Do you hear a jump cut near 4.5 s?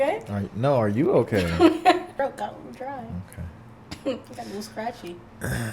no; 1 cut; at 2.2 s

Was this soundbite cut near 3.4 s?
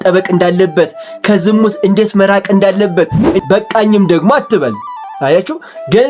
yes; 1 cut; at 3.4 s

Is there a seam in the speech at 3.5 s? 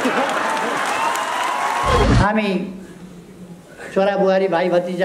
no; 1 cut; at 2.0 s

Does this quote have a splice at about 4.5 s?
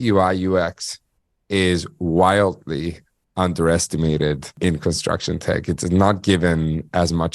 yes; 1 cut; at 4.5 s

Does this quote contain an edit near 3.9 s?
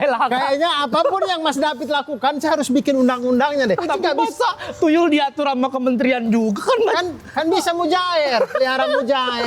yes; 1 cut; at 3.9 s

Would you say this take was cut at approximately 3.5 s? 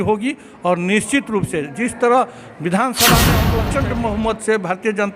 yes; 1 cut; at 3.5 s

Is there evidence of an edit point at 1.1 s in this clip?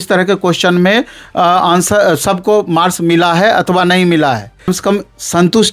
no; 1 cut; at 4.7 s

